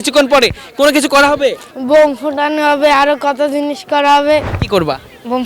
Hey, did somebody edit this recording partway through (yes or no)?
yes